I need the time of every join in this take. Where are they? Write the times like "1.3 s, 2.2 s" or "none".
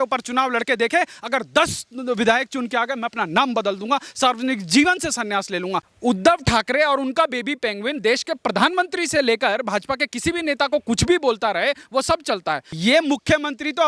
5.9 s, 12.7 s